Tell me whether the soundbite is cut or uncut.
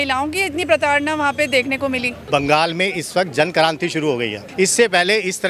cut